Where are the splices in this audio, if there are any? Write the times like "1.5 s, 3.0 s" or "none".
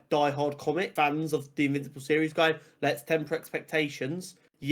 0.9 s